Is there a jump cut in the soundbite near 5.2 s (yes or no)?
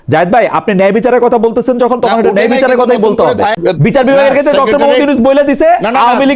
no